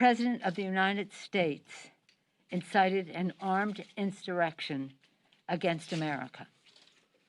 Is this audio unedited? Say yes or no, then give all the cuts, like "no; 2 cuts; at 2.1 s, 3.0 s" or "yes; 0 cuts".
no; 1 cut; at 6.2 s